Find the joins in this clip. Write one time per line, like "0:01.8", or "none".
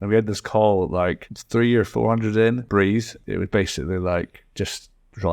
0:01.3
0:03.1